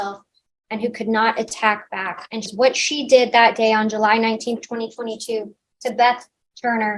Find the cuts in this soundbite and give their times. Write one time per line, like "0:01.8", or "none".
0:02.5